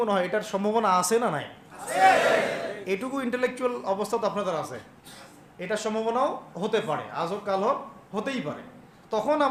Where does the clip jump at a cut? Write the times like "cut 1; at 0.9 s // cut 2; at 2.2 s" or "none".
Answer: none

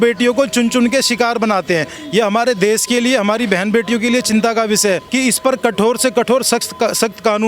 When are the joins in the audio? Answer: cut 1; at 2.0 s // cut 2; at 5.1 s

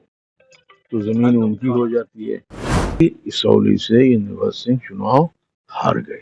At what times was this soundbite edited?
cut 1; at 3.0 s

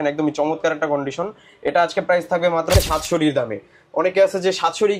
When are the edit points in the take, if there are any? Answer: cut 1; at 2.7 s

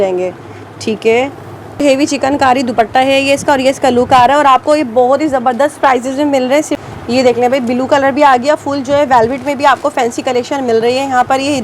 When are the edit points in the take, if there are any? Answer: cut 1; at 1.8 s // cut 2; at 6.7 s

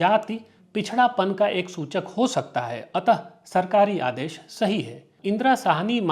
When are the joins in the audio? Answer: cut 1; at 5.1 s

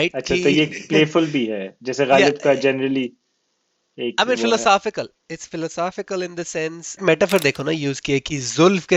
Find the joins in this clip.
cut 1; at 7.0 s

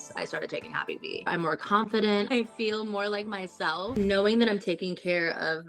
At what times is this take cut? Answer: cut 1; at 1.3 s // cut 2; at 2.3 s // cut 3; at 3.9 s

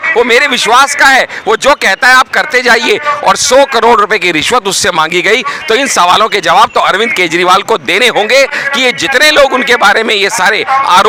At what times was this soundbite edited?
none

